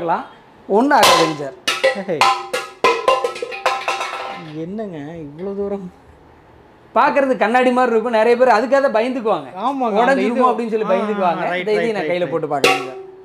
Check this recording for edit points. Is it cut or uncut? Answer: uncut